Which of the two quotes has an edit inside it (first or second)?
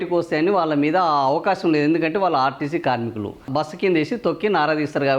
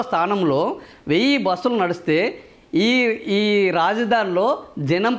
first